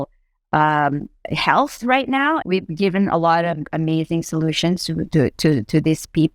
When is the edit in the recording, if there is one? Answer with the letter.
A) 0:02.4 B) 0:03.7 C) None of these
A